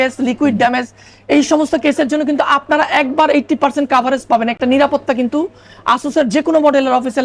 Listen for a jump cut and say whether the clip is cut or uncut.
uncut